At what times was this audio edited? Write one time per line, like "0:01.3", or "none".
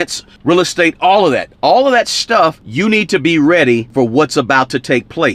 0:02.6
0:03.9